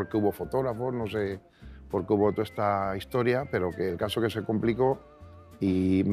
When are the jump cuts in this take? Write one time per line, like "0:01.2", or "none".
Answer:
none

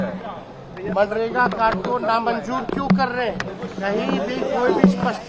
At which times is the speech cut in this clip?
0:03.6

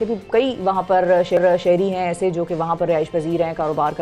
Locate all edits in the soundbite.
none

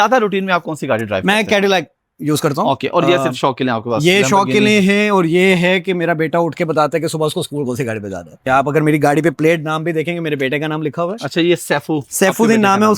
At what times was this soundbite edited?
0:08.3

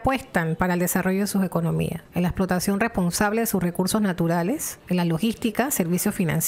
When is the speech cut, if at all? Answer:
0:02.0
0:04.7

